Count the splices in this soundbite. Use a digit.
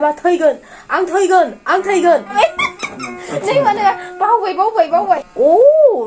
2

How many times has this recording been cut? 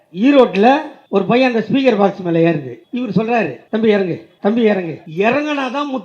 4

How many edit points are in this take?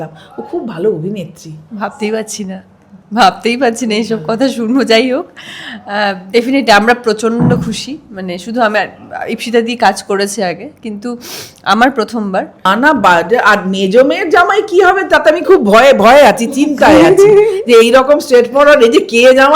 1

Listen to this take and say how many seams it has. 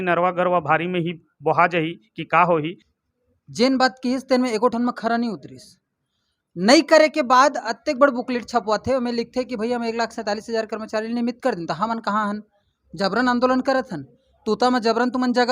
1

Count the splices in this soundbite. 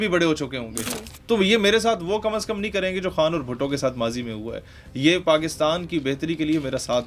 0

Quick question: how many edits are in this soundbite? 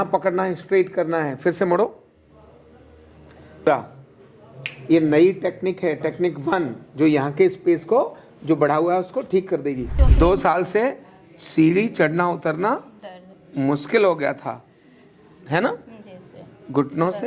2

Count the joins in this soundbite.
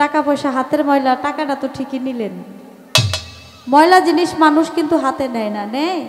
0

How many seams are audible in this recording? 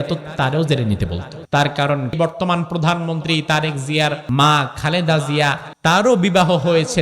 4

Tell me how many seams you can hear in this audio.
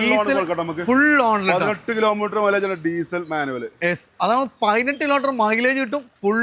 0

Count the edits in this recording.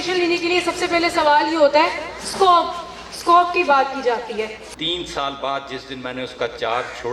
1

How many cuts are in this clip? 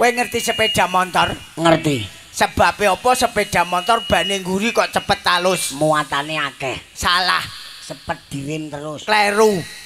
0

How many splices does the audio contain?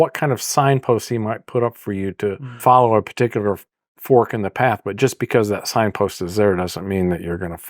1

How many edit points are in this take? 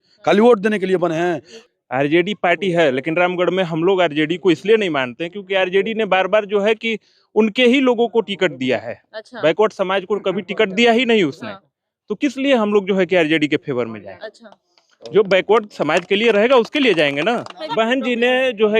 2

